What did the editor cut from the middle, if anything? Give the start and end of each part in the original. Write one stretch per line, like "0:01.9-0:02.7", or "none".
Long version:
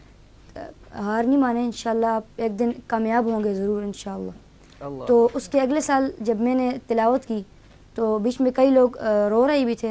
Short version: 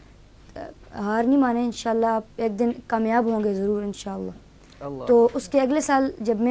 none